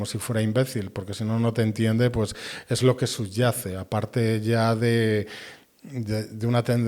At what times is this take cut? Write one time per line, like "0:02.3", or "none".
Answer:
none

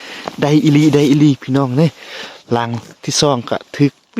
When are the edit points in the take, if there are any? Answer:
none

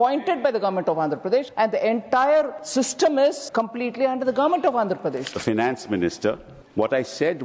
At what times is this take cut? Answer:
0:01.5
0:02.6
0:03.4
0:05.3
0:06.5

